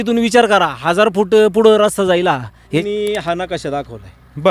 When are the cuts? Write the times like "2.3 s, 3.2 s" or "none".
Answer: 2.8 s